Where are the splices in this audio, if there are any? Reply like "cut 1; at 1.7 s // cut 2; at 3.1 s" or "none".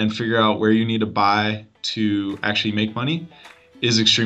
none